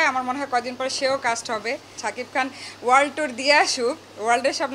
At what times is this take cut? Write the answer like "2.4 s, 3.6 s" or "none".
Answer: 1.9 s